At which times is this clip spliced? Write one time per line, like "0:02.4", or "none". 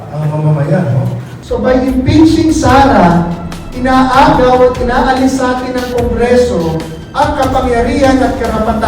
0:01.4